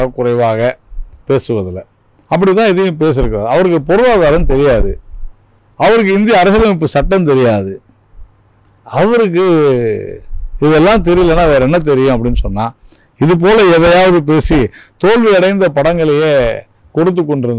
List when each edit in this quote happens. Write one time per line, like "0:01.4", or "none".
none